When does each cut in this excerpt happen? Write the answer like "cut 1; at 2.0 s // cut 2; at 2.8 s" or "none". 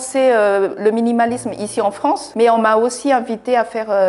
cut 1; at 2.3 s